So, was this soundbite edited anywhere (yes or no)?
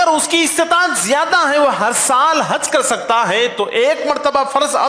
no